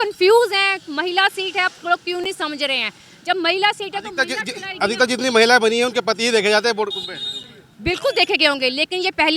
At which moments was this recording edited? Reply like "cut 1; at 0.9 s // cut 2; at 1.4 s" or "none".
none